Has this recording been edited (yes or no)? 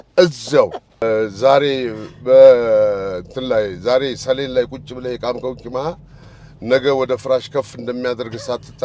yes